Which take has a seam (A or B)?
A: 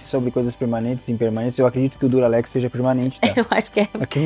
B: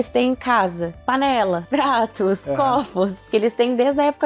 B